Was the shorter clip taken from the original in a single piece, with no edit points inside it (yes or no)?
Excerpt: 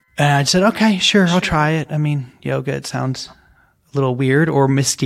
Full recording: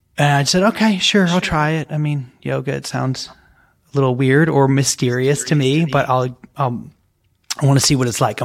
yes